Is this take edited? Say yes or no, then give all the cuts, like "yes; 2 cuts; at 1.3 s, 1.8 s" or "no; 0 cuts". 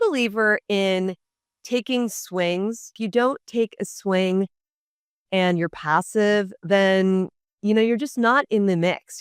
yes; 1 cut; at 3.0 s